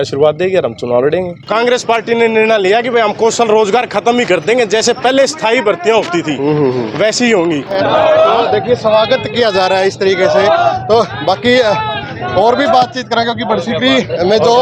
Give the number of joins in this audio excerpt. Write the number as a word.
two